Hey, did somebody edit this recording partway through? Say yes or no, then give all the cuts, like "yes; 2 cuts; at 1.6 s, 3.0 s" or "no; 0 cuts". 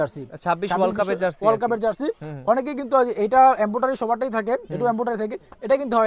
no; 0 cuts